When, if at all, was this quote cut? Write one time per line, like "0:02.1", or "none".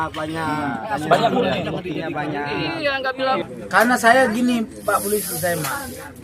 0:03.5

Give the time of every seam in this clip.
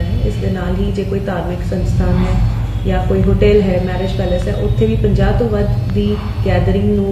none

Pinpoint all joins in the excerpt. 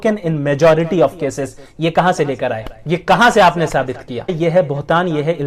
0:02.7
0:04.3

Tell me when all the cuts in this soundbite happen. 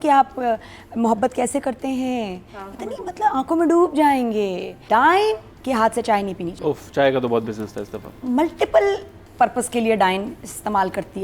0:04.8
0:05.5
0:06.5

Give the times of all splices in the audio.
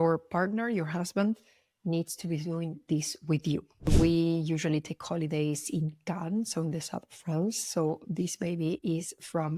0:03.9

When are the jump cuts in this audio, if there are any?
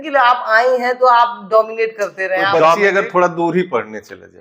0:02.8

